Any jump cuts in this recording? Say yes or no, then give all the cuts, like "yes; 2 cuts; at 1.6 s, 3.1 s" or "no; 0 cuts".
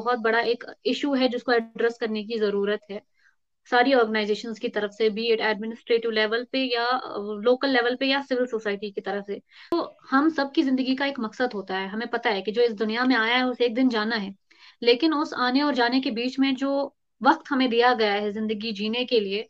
yes; 1 cut; at 9.7 s